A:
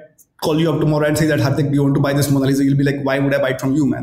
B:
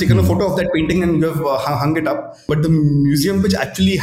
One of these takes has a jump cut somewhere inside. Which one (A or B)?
B